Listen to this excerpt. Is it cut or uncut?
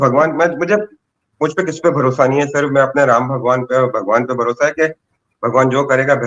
uncut